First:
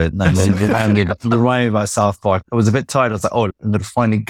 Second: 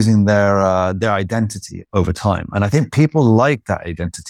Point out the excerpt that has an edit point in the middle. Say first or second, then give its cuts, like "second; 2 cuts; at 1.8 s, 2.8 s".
first; 2 cuts; at 2.4 s, 3.5 s